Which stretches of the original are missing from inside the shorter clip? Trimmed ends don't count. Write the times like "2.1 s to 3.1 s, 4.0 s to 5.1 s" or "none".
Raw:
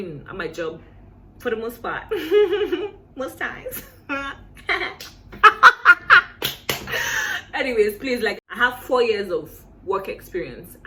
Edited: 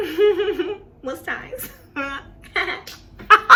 none